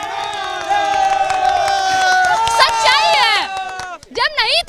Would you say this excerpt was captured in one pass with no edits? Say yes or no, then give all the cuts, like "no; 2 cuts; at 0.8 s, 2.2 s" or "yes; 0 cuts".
yes; 0 cuts